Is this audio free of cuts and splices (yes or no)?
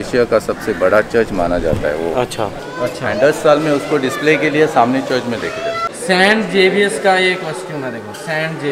no